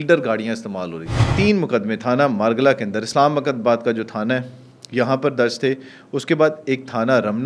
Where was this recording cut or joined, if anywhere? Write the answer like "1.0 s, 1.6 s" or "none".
1.3 s